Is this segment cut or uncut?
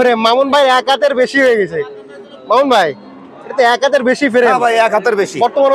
uncut